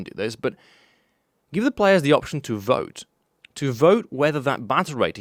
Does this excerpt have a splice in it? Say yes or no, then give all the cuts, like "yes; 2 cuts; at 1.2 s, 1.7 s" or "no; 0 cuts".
no; 0 cuts